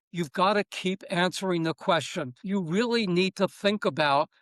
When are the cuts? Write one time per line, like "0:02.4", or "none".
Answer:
0:02.4